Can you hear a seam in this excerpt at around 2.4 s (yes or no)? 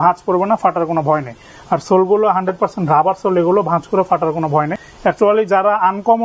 no